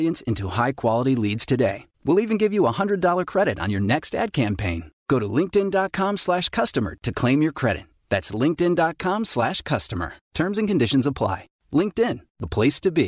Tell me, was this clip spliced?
no; 0 cuts

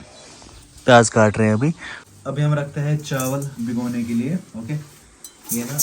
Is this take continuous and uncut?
no; 1 cut; at 2.2 s

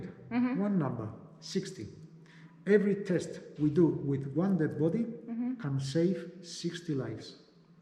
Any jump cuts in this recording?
no; 0 cuts

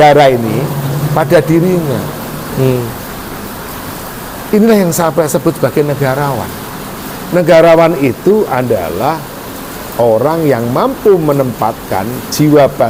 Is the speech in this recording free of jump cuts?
yes; 0 cuts

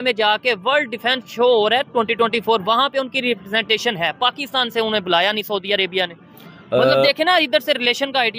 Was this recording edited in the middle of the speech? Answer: no; 0 cuts

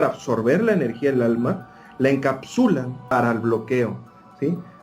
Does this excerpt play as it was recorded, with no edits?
no; 1 cut; at 3.0 s

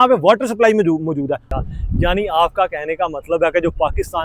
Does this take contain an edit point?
yes; 1 cut; at 1.5 s

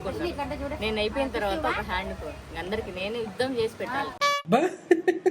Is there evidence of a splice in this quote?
yes; 1 cut; at 4.1 s

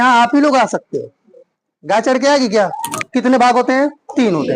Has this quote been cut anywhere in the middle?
yes; 1 cut; at 3.0 s

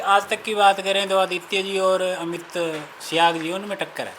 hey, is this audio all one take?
no; 1 cut; at 2.9 s

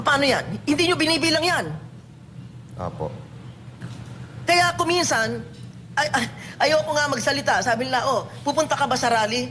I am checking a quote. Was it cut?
no; 0 cuts

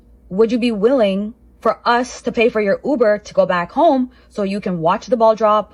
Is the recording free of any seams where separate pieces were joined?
yes; 0 cuts

